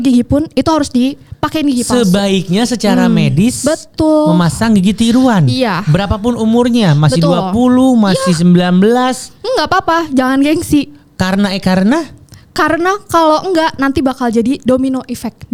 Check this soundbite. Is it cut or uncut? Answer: uncut